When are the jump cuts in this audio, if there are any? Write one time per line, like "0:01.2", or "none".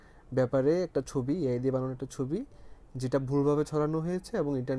none